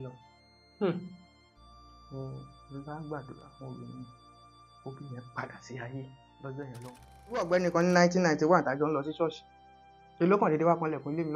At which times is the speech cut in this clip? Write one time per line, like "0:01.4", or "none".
0:07.4

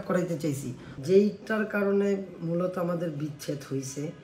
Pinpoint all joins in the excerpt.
0:00.9

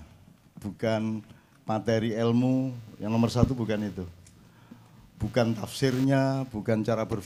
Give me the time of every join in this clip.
none

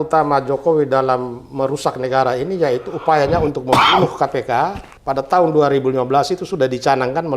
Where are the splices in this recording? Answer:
0:04.9

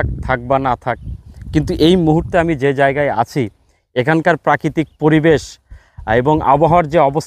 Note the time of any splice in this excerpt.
none

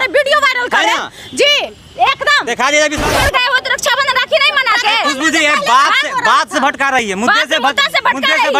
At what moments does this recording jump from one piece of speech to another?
0:03.0

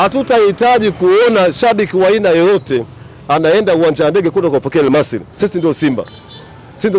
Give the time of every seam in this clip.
0:05.2

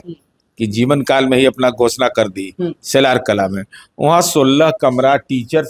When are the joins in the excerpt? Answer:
none

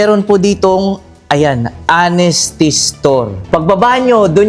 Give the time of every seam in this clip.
0:03.4

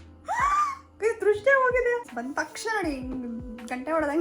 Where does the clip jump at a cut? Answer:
0:02.1

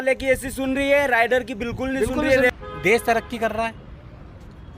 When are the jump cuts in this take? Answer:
0:02.5

